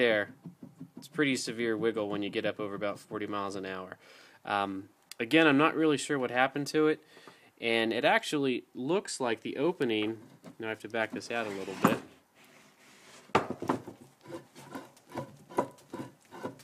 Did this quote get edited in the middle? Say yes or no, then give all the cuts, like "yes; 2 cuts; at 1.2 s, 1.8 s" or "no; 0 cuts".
no; 0 cuts